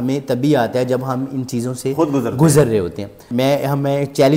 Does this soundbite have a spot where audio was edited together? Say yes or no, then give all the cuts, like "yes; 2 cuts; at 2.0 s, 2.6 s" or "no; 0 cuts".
yes; 1 cut; at 3.2 s